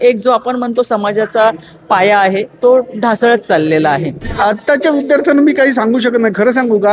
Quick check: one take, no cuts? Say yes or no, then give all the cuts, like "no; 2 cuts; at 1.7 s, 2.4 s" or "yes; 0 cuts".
no; 2 cuts; at 2.5 s, 4.2 s